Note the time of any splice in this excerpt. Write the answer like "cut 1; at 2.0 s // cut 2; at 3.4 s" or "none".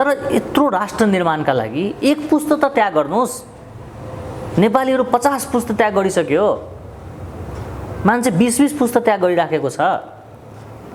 none